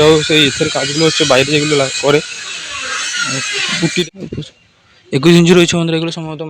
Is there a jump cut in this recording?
yes; 1 cut; at 4.0 s

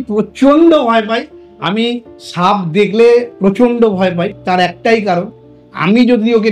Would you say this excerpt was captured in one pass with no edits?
yes; 0 cuts

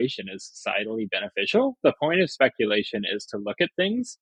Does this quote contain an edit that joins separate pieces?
no; 0 cuts

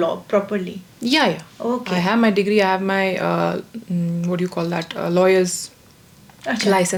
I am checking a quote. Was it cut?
no; 0 cuts

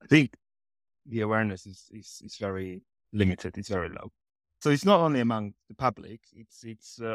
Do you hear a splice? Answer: no; 0 cuts

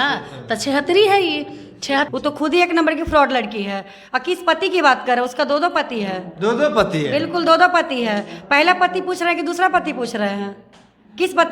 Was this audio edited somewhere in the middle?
yes; 1 cut; at 2.1 s

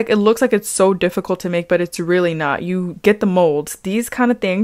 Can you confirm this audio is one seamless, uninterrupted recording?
yes; 0 cuts

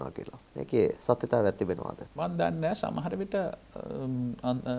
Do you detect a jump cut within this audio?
yes; 1 cut; at 2.0 s

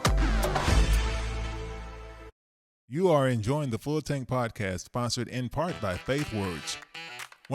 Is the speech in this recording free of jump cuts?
no; 1 cut; at 2.4 s

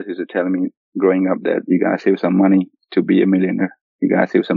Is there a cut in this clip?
no; 0 cuts

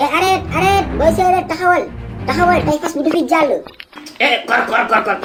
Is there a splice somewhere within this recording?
no; 0 cuts

